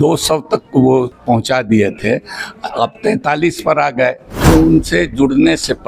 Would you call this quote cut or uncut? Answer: cut